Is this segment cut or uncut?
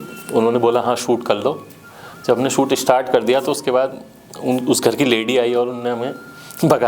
uncut